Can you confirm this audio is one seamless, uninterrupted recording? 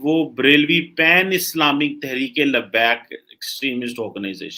yes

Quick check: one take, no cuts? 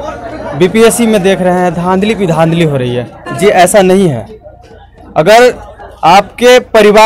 no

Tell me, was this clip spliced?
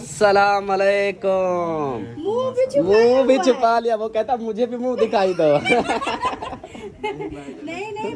no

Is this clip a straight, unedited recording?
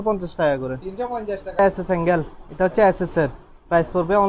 no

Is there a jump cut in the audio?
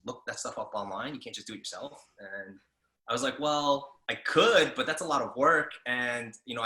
no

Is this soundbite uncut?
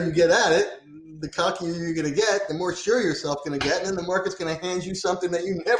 yes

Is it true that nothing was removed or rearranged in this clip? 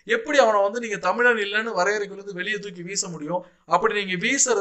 yes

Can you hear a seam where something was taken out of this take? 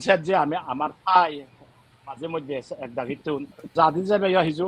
yes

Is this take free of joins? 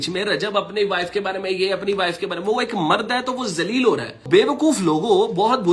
no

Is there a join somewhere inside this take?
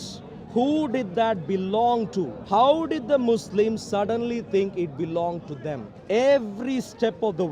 yes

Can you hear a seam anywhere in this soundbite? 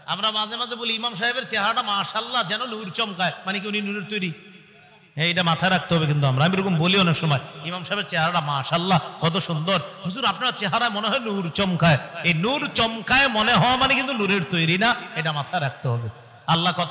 no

